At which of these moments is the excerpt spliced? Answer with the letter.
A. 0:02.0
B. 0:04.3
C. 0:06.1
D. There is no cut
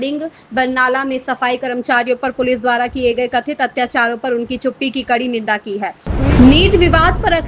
C